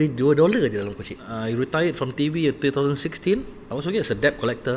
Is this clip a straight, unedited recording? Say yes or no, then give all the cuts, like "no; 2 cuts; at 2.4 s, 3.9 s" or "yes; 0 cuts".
no; 2 cuts; at 1.3 s, 3.6 s